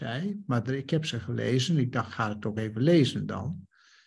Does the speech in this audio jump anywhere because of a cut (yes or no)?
no